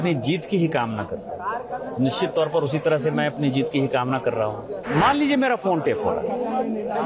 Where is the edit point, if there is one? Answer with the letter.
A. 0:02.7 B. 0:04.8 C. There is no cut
B